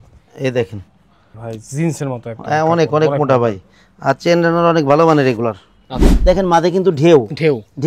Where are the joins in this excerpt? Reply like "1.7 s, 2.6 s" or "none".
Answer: 1.4 s, 6.0 s